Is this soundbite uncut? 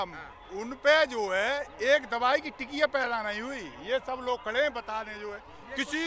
yes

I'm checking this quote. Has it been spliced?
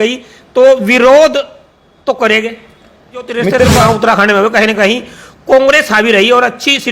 yes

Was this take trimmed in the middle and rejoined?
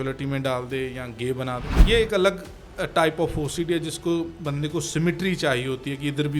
yes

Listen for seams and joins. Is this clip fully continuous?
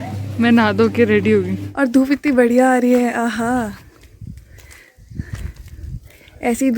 no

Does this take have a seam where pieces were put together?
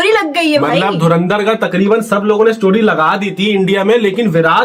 no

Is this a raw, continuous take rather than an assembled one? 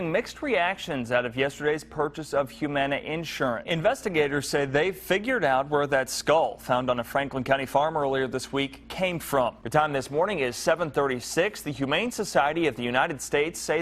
no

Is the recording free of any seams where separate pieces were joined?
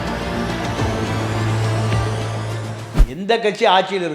no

